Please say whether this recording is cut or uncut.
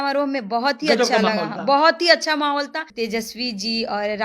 cut